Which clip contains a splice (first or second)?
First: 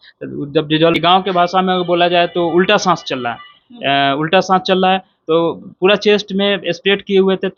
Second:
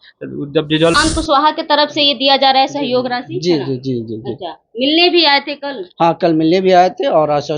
second